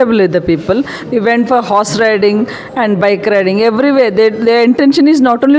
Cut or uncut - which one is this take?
uncut